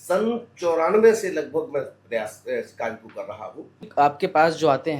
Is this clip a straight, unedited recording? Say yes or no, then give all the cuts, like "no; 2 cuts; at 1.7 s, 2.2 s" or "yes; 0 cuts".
no; 1 cut; at 3.9 s